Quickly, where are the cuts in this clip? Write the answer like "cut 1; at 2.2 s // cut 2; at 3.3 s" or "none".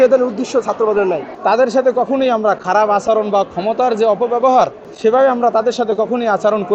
cut 1; at 1.3 s // cut 2; at 4.8 s

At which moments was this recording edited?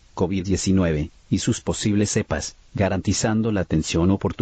cut 1; at 1.1 s

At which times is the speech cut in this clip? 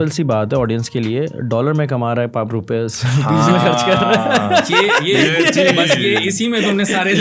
none

